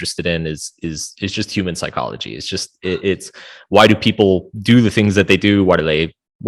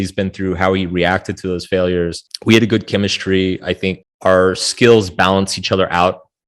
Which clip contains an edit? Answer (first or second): second